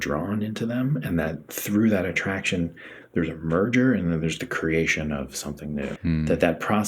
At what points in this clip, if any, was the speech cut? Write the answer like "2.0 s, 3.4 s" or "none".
6.0 s